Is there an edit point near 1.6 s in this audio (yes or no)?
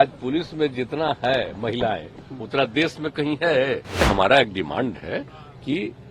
no